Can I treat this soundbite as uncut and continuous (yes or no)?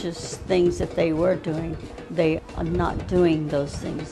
no